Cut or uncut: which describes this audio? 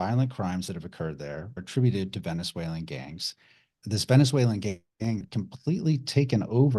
cut